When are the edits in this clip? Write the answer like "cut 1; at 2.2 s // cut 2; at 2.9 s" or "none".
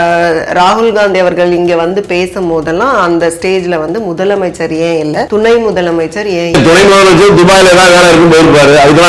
cut 1; at 5.3 s // cut 2; at 6.5 s